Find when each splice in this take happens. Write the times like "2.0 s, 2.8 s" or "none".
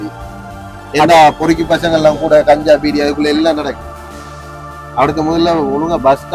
none